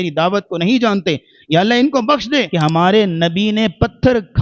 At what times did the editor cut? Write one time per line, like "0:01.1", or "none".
0:02.5